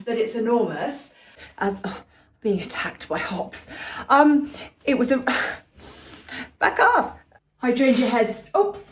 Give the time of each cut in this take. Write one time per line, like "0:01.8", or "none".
0:01.3
0:07.2